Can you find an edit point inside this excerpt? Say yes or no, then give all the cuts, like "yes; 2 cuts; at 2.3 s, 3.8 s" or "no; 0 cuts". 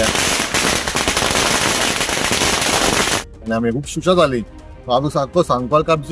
yes; 1 cut; at 3.5 s